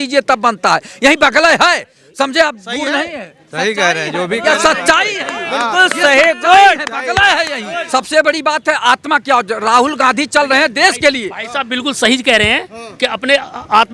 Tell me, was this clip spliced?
yes; 1 cut; at 7.8 s

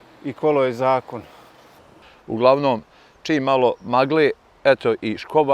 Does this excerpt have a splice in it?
yes; 1 cut; at 2.0 s

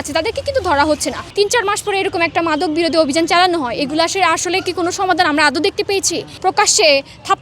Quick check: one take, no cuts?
no; 2 cuts; at 1.2 s, 6.3 s

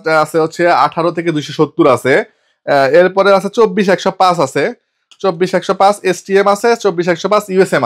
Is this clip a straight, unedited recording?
yes; 0 cuts

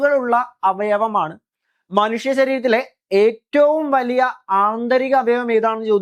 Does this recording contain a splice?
no; 0 cuts

